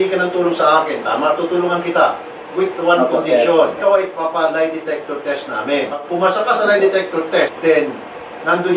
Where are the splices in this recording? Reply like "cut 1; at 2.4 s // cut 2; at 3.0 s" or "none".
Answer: cut 1; at 3.8 s // cut 2; at 6.1 s // cut 3; at 7.5 s